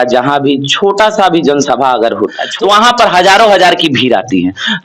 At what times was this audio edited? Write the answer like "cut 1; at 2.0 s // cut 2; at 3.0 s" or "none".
cut 1; at 2.4 s